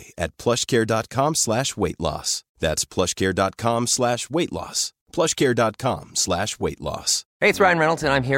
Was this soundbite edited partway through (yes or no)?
no